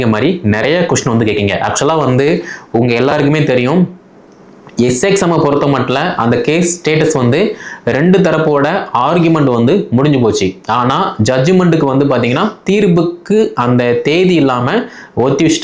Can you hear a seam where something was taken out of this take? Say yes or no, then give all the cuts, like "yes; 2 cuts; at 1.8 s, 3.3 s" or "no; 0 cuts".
no; 0 cuts